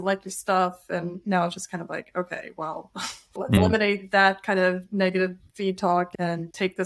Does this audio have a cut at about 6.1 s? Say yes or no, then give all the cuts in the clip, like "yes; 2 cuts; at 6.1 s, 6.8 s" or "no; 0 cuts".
yes; 2 cuts; at 3.6 s, 6.1 s